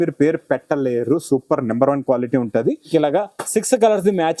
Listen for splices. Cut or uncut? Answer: cut